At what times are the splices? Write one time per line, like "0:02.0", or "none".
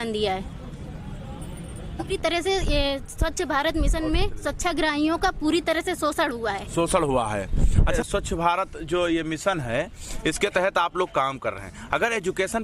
0:02.1
0:08.0